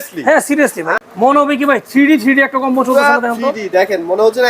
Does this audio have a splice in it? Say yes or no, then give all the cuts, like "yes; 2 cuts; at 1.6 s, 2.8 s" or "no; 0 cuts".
yes; 1 cut; at 0.9 s